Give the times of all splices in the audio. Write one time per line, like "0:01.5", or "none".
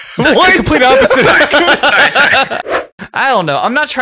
0:02.6